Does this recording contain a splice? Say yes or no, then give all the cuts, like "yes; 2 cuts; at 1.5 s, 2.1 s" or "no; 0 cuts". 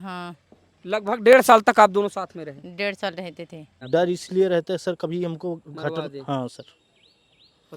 yes; 1 cut; at 3.7 s